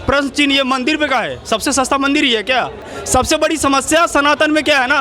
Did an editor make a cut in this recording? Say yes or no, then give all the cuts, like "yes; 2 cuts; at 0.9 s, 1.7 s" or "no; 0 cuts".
no; 0 cuts